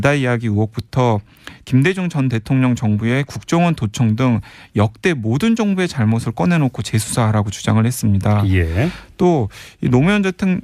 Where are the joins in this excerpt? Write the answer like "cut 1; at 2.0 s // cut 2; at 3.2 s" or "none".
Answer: cut 1; at 6.4 s